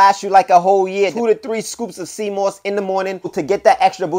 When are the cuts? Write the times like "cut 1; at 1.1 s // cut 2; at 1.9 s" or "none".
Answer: cut 1; at 1.1 s // cut 2; at 3.4 s